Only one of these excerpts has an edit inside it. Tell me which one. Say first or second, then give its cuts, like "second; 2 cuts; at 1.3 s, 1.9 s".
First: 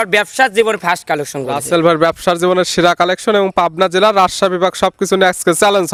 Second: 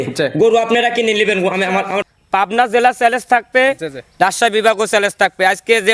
second; 1 cut; at 2.0 s